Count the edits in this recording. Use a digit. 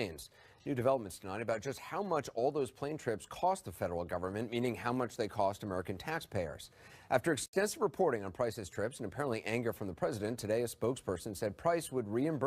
1